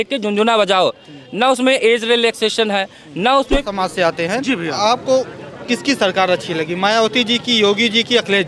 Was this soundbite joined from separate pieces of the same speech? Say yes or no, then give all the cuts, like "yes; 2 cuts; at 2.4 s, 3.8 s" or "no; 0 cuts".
yes; 1 cut; at 3.7 s